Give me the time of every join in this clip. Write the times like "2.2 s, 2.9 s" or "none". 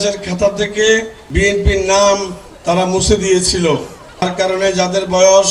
1.2 s, 4.2 s